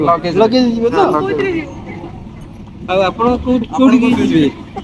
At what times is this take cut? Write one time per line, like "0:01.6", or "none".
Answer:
none